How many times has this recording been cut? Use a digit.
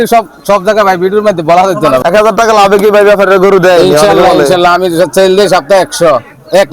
1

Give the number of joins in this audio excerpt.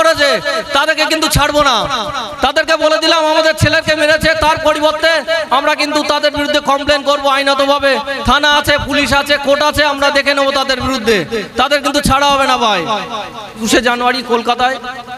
1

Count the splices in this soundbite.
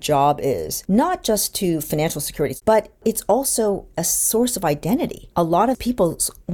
1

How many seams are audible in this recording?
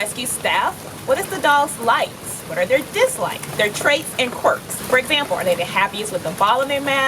1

